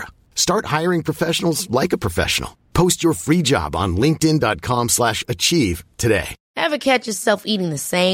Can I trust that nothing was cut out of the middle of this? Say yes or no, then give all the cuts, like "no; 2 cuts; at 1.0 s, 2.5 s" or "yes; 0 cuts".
no; 1 cut; at 6.4 s